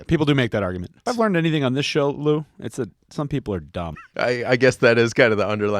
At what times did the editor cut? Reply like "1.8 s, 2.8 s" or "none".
0.9 s, 3.9 s